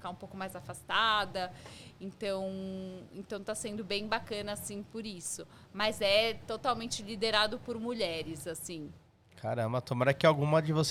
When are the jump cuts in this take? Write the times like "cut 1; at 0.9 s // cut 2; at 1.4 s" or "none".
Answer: none